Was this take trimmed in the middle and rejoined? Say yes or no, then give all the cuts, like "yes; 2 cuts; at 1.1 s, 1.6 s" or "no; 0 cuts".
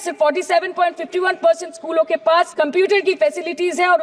yes; 1 cut; at 2.5 s